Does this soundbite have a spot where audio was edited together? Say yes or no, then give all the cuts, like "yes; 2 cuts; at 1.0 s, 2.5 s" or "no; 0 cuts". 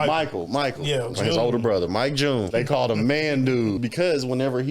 yes; 3 cuts; at 1.1 s, 2.5 s, 3.8 s